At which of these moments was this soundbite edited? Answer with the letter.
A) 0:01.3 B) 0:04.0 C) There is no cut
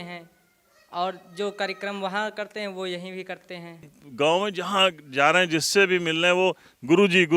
B